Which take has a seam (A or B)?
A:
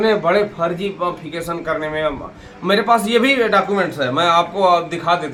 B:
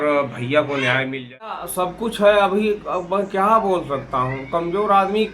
B